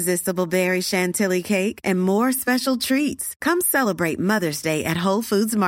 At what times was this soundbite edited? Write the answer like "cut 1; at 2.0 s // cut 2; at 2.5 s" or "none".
none

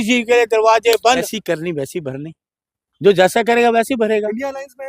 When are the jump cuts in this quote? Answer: cut 1; at 1.3 s

